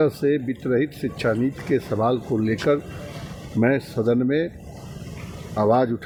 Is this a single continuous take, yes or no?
yes